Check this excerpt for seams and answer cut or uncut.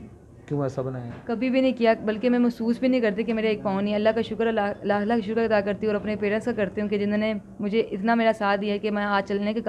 uncut